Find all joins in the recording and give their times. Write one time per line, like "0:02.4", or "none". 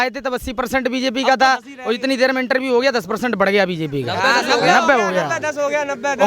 none

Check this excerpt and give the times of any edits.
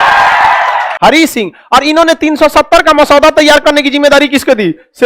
0:00.9

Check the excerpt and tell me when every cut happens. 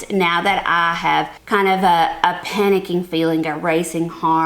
0:01.4

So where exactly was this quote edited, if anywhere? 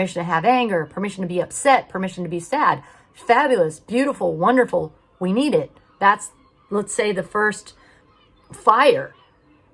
none

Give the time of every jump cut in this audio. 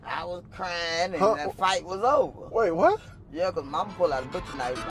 none

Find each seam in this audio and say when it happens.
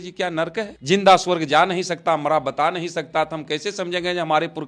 none

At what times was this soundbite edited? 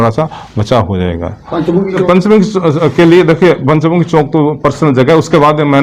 0:02.0

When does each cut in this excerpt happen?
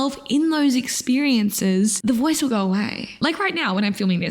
0:03.1

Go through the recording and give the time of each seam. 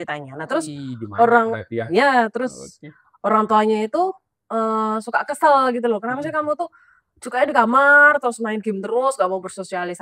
none

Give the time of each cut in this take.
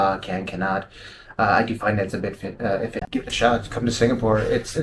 0:03.0

